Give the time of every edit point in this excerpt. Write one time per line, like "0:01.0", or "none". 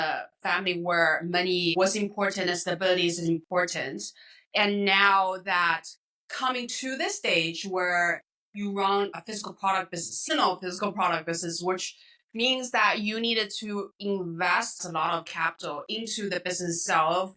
0:01.8
0:09.1
0:14.8